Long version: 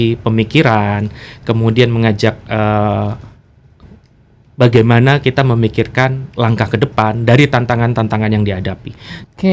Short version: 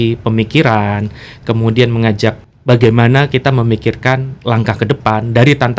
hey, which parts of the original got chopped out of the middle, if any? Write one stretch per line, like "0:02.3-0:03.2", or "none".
0:02.4-0:04.3